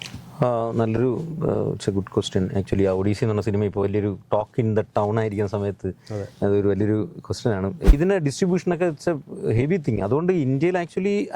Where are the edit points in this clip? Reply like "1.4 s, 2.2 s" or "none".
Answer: 7.9 s